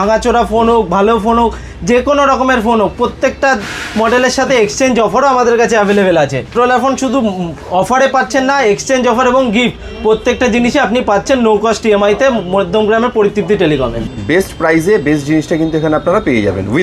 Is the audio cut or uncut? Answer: cut